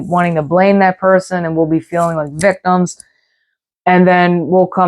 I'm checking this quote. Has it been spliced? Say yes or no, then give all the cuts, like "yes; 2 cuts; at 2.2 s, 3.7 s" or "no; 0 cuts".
no; 0 cuts